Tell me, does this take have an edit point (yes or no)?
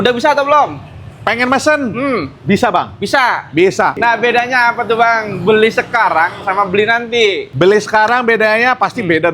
yes